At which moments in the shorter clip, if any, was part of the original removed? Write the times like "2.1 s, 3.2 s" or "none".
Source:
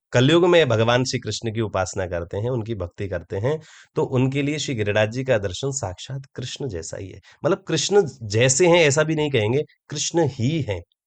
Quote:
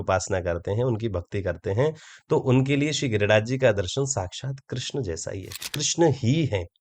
5.6 s